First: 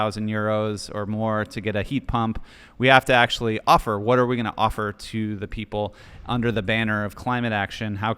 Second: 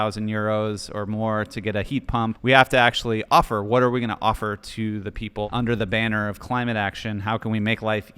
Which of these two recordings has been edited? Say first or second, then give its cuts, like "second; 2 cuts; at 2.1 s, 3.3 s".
second; 2 cuts; at 2.4 s, 5.5 s